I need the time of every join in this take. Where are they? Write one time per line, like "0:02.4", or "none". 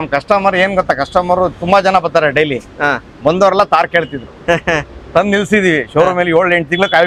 none